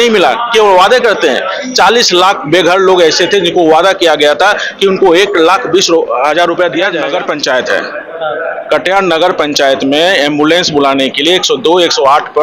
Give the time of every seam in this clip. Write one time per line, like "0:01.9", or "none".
0:07.0